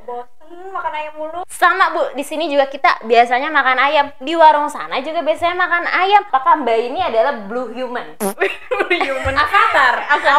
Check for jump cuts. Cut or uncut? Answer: cut